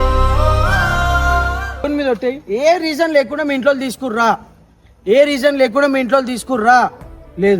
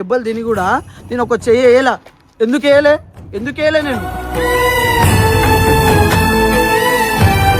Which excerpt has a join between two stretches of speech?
first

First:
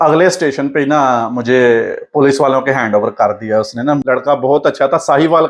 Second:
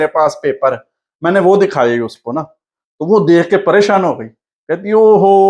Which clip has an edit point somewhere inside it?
first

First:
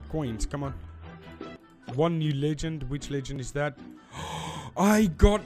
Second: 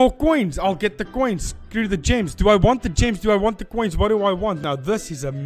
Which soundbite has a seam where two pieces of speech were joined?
first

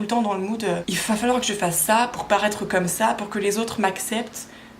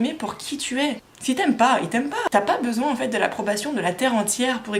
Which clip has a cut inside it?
first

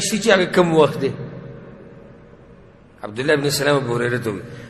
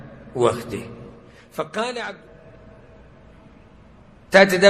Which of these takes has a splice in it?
second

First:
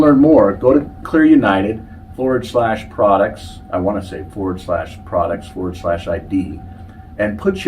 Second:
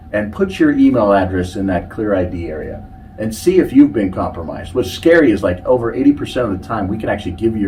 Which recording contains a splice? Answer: first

